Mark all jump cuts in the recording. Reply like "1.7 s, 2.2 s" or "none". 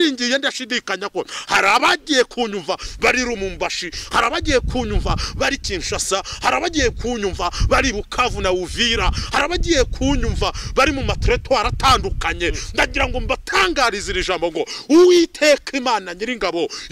none

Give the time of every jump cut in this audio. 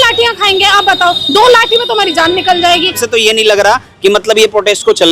3.0 s

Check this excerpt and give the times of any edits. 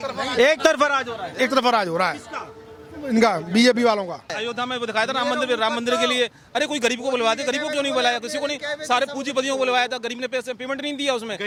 none

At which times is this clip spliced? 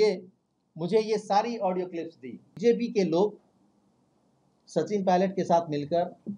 2.5 s

